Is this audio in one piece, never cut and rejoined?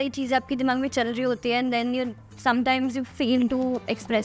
no; 1 cut; at 2.2 s

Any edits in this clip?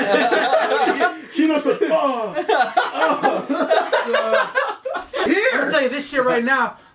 yes; 1 cut; at 5.2 s

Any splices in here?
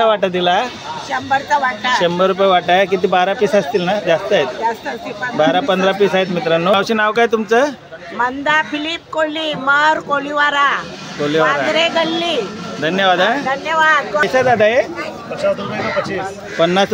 yes; 2 cuts; at 6.7 s, 14.2 s

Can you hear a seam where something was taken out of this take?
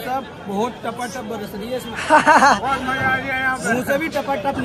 no; 0 cuts

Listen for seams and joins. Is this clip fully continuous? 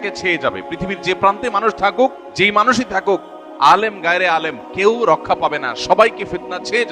no; 1 cut; at 2.2 s

